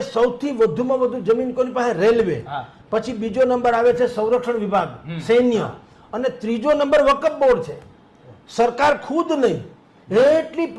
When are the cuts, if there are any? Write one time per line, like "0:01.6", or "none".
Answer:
none